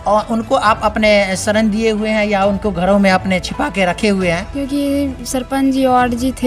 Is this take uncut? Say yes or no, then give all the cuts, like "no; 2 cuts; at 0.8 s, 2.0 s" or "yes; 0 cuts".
no; 1 cut; at 4.5 s